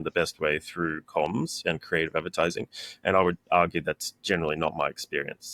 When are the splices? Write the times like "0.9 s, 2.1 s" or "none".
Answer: none

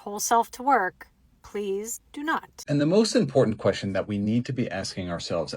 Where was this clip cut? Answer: 2.3 s

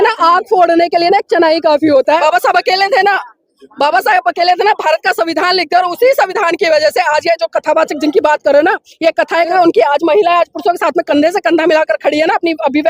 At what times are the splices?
2.2 s, 9.5 s

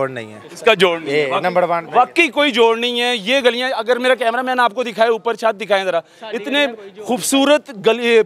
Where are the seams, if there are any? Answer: none

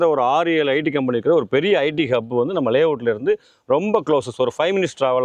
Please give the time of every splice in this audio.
none

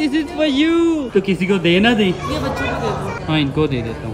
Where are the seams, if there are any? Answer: 1.1 s

